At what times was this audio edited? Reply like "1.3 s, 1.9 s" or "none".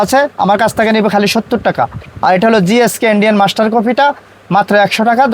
none